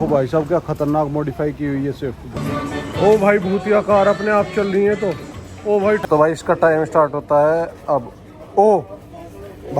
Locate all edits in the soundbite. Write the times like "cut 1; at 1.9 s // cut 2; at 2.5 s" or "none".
cut 1; at 2.3 s // cut 2; at 6.0 s